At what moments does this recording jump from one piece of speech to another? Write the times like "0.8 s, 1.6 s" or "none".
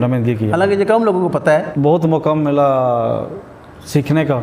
1.7 s